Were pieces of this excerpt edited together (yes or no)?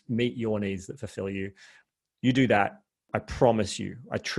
yes